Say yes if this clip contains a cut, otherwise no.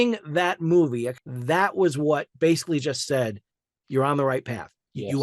yes